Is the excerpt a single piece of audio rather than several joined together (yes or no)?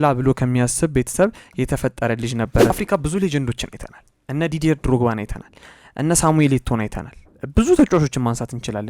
no